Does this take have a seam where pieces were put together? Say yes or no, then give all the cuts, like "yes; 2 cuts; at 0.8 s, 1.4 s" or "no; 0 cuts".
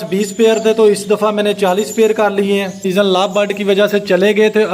yes; 1 cut; at 2.8 s